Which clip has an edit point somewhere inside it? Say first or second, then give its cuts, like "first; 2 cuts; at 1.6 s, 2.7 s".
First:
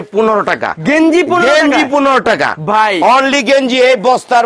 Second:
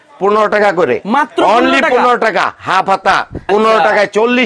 second; 1 cut; at 3.5 s